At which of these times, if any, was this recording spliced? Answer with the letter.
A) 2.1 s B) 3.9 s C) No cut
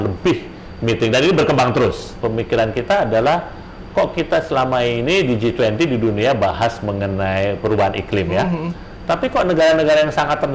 A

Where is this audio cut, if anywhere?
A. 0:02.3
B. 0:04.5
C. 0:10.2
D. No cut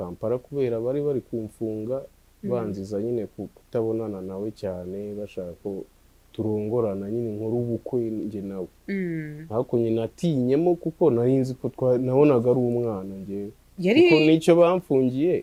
D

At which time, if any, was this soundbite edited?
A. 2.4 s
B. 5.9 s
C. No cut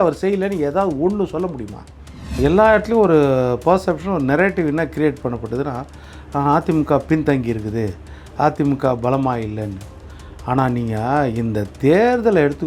A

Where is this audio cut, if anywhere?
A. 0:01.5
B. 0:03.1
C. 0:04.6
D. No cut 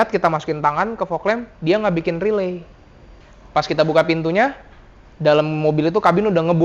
B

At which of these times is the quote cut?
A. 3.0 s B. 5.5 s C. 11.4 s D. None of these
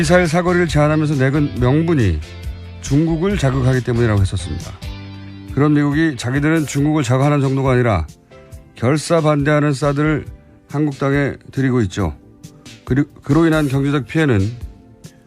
A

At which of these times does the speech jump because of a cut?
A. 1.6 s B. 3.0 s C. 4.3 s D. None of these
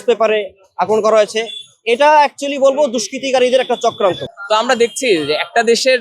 C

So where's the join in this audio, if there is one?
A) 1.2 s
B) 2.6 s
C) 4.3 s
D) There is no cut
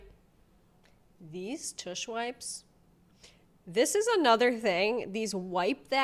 D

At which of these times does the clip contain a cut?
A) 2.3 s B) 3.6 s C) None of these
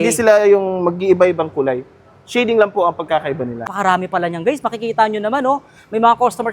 B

